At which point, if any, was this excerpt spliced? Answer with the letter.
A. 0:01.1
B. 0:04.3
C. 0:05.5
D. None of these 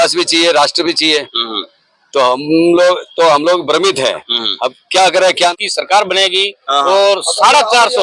C